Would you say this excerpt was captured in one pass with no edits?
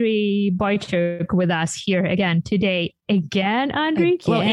no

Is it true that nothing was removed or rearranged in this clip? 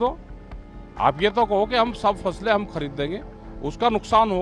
yes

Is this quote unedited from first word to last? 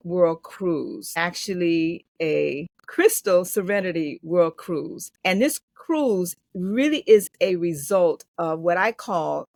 yes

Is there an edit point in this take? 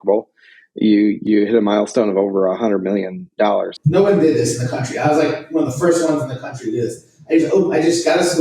yes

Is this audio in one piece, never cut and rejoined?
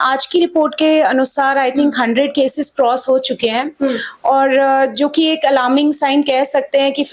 yes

